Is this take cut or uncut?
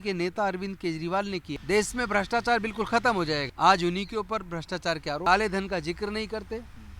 cut